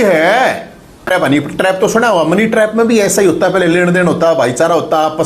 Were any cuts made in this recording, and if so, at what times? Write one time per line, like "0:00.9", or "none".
0:01.1

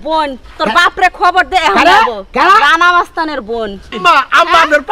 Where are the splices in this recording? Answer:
0:04.0

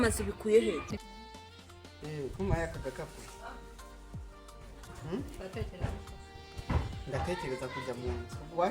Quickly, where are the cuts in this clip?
0:01.0

